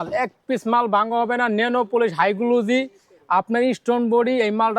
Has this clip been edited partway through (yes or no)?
no